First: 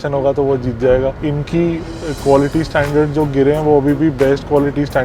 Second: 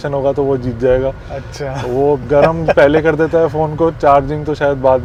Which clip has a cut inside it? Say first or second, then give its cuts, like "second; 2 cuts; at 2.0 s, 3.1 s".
first; 1 cut; at 1.2 s